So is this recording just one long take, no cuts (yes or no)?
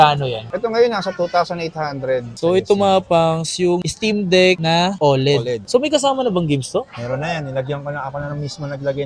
no